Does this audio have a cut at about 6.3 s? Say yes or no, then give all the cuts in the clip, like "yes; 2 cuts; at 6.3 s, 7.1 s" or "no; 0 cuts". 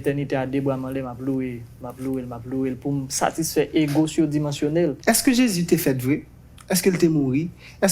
no; 1 cut; at 5.0 s